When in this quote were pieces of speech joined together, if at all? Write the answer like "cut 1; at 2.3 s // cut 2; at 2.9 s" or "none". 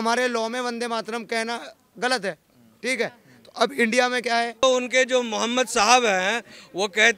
cut 1; at 4.6 s